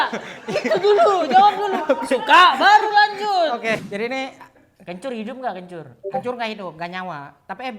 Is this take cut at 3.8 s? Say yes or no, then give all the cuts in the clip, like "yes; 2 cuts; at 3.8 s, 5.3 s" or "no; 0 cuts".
yes; 1 cut; at 3.8 s